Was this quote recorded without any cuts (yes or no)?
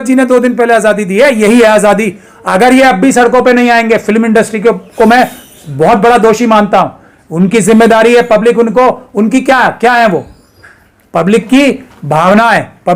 yes